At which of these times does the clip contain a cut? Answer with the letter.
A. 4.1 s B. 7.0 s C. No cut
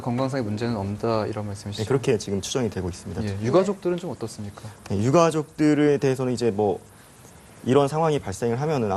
A